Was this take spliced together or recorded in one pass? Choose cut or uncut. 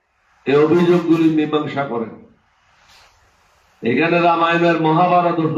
uncut